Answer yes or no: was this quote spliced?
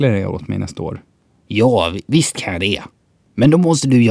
yes